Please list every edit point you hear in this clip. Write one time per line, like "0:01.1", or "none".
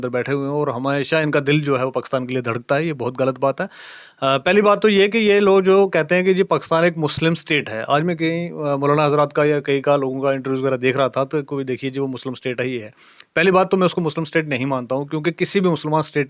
none